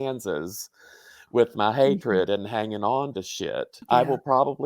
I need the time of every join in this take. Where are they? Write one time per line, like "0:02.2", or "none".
0:03.7

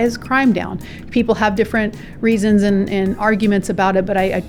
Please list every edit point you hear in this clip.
none

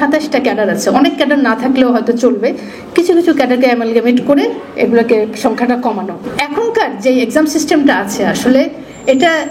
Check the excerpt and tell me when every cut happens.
0:06.2

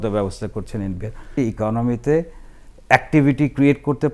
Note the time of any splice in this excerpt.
0:01.4

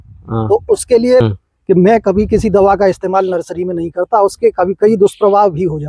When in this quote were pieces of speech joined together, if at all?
0:01.2

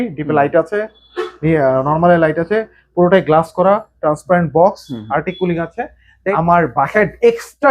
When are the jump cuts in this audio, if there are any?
0:06.3

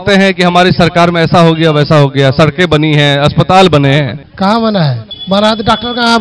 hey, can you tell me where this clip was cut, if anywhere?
0:04.2
0:05.1

